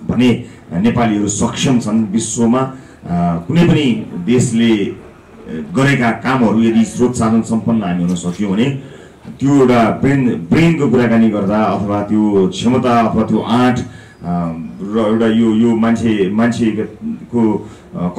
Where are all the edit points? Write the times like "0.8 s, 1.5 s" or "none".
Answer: none